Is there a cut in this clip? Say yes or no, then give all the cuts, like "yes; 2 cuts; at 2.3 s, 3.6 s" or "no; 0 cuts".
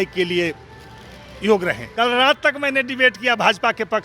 yes; 1 cut; at 1.8 s